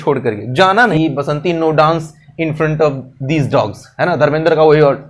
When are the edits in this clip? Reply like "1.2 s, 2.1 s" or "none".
1.0 s